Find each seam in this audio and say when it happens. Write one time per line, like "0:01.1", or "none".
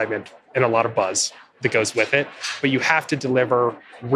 0:02.6